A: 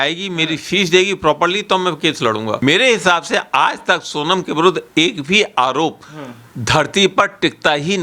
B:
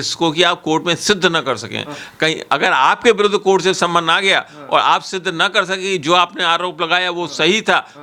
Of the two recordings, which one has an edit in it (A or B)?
A